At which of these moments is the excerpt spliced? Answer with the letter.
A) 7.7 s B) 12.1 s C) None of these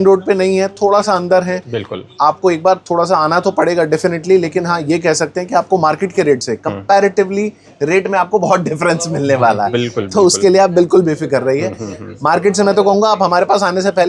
A